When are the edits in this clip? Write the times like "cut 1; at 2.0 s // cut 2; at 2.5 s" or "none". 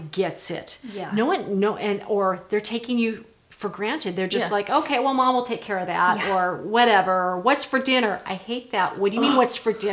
none